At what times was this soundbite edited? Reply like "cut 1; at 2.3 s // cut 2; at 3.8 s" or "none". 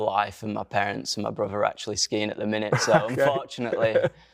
none